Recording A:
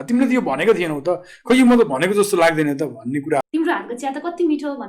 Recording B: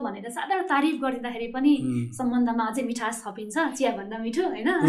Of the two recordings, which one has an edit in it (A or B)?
A